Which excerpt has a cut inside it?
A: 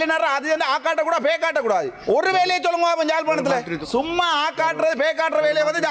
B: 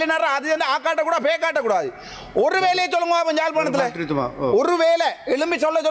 A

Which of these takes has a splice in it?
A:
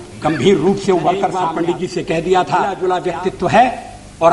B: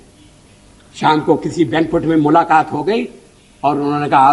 A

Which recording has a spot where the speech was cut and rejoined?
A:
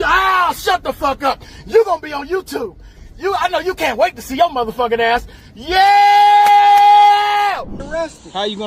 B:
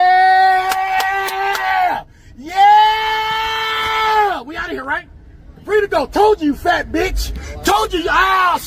A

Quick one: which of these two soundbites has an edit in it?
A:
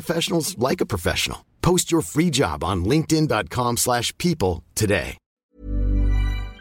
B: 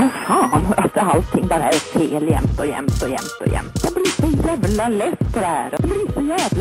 A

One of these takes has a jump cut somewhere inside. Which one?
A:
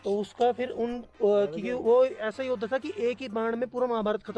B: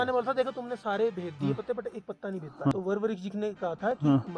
B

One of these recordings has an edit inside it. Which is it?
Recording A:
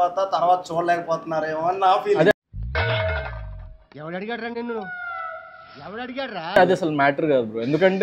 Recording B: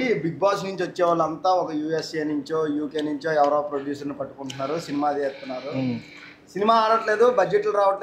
A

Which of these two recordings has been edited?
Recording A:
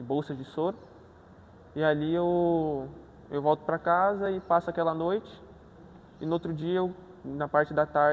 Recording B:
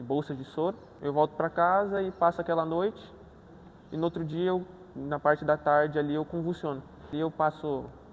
B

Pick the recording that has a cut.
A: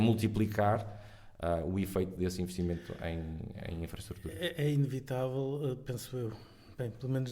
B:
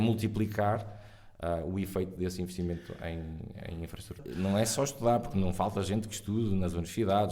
B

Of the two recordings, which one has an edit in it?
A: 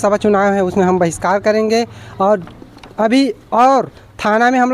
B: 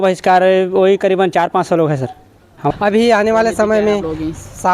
B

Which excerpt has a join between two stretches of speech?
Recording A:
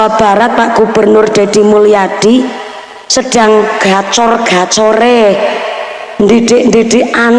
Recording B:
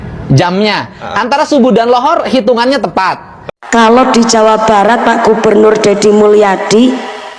B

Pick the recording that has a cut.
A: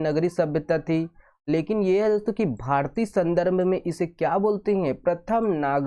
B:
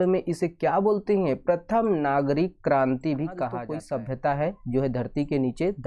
B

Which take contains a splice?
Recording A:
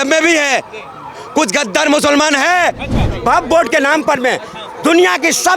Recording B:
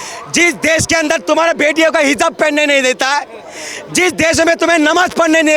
A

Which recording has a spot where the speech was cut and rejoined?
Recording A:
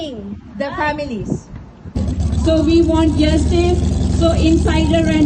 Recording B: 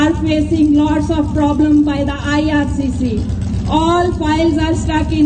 A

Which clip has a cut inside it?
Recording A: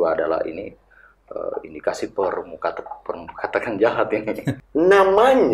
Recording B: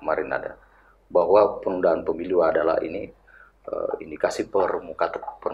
A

